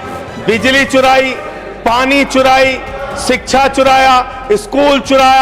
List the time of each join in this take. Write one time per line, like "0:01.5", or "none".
none